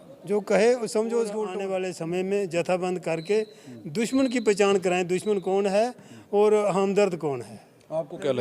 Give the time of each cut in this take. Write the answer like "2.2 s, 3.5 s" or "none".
1.5 s